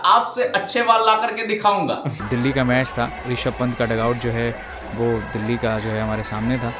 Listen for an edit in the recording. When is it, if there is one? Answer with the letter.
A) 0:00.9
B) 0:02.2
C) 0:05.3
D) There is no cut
B